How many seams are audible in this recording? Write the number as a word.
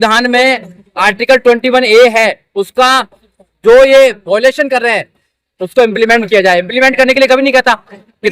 zero